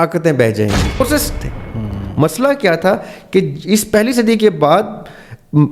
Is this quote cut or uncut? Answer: cut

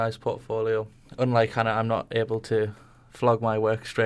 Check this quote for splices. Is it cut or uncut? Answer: cut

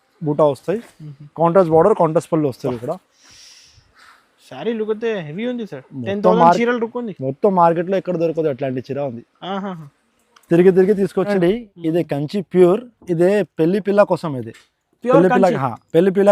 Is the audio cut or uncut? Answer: cut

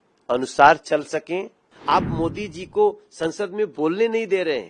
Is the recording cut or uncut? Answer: cut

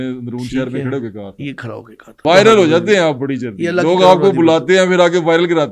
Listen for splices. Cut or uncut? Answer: cut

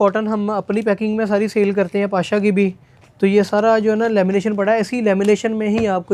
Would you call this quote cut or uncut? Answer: uncut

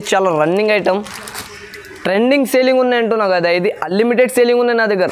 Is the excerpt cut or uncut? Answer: uncut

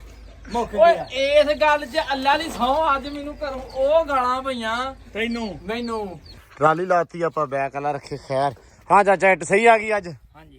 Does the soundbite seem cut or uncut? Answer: cut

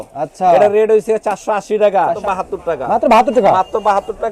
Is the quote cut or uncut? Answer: cut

